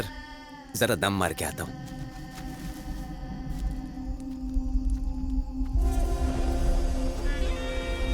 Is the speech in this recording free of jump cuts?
yes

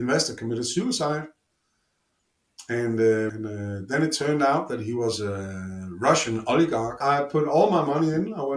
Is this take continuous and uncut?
no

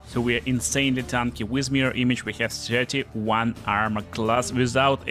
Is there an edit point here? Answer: no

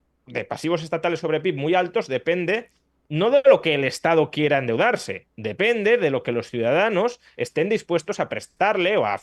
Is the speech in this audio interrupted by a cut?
no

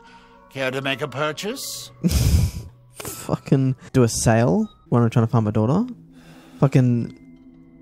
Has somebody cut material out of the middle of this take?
yes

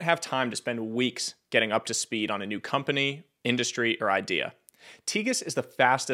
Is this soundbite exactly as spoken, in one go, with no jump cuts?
yes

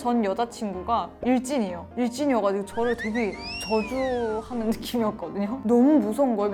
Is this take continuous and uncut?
yes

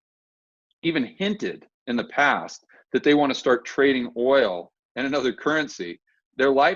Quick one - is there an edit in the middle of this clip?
no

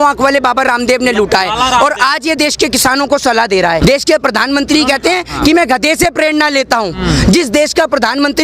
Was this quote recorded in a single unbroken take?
no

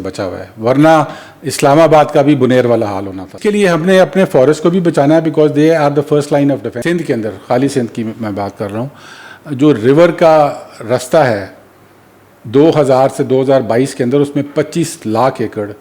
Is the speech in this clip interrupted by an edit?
yes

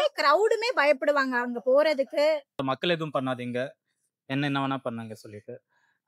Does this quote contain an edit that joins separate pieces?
yes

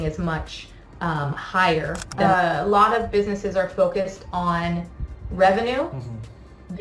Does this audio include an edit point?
yes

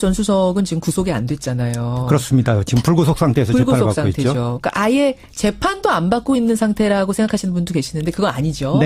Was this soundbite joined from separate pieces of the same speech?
yes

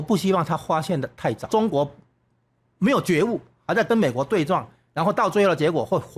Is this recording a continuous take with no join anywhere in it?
no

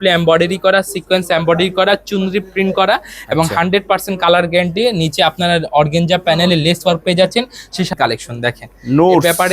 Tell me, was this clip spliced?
yes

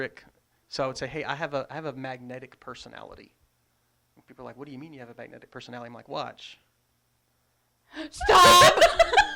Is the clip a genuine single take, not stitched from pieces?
yes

